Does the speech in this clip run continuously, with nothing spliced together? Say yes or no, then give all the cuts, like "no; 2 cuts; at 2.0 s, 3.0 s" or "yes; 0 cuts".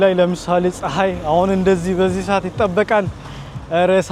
yes; 0 cuts